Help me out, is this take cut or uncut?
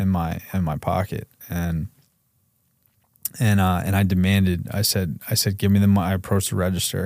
uncut